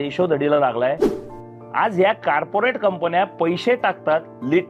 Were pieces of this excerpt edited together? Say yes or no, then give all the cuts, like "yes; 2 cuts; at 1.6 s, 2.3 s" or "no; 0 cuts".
yes; 1 cut; at 1.1 s